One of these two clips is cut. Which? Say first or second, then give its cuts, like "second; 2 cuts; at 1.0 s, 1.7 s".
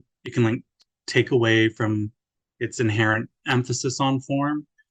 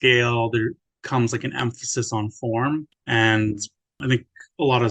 second; 3 cuts; at 0.9 s, 3.0 s, 4.0 s